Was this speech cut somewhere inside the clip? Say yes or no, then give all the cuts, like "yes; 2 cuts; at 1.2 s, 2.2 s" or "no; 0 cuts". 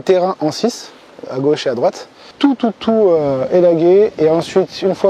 yes; 1 cut; at 2.3 s